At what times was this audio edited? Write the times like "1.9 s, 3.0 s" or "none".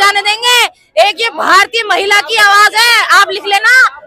none